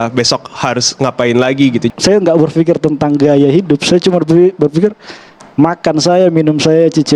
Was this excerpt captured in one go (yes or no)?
no